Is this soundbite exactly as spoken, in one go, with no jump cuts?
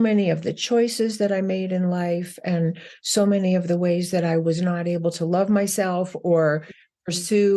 yes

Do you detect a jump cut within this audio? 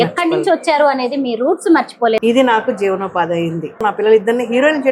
yes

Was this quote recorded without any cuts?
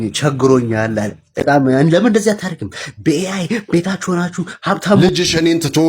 no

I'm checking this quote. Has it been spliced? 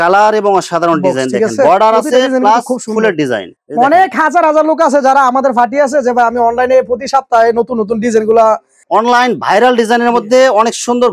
yes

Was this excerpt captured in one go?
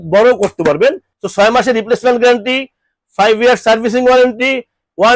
no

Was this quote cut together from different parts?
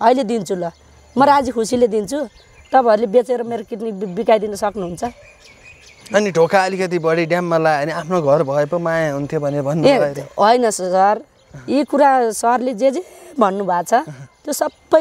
no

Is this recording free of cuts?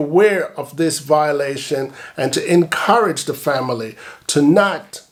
yes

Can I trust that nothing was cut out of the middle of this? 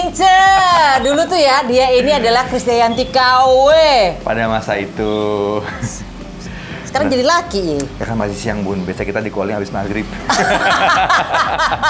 yes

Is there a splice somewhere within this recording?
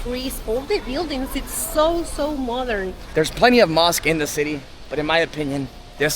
yes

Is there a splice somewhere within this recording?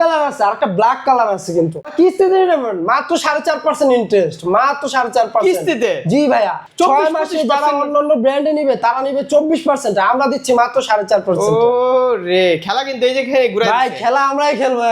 yes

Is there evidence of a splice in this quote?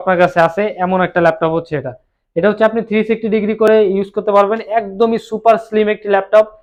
no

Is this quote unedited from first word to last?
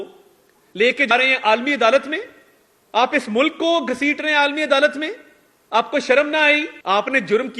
no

